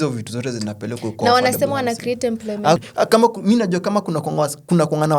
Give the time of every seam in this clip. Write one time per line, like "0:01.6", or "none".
0:02.8